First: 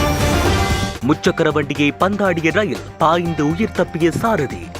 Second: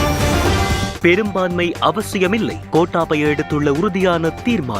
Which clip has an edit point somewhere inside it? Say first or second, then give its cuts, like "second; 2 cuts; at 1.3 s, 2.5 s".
first; 1 cut; at 0.9 s